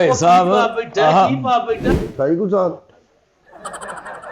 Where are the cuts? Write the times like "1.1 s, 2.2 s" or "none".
1.9 s